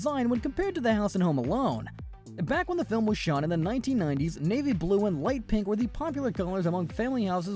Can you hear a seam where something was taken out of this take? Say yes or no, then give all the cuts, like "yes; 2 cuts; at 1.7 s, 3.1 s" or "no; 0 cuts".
yes; 1 cut; at 5.1 s